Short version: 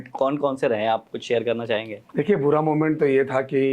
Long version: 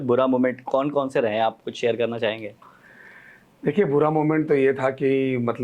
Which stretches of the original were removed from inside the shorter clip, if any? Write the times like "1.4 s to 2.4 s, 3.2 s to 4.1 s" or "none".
2.5 s to 3.5 s

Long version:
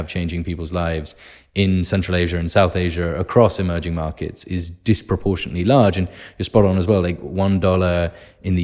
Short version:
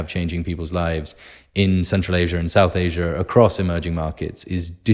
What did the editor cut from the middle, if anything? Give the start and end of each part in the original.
none

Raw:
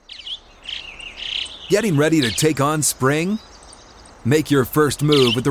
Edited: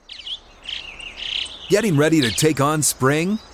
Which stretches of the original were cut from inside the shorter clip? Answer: none

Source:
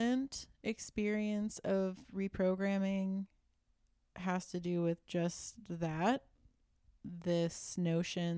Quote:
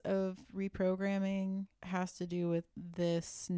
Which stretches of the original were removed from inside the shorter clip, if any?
3.4 s to 4.1 s, 5.0 s to 7.0 s

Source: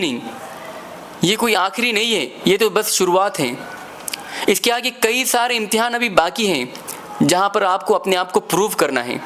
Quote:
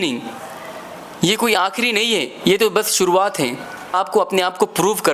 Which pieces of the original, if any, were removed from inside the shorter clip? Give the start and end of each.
3.9 s to 7.7 s

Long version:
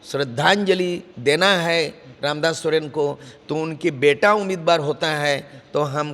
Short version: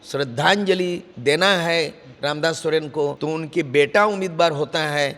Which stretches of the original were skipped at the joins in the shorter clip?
3.2 s to 3.5 s

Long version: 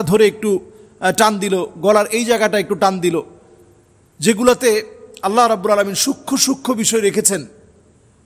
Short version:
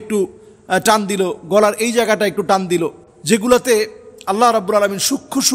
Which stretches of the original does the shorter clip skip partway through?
3.4 s to 4.0 s

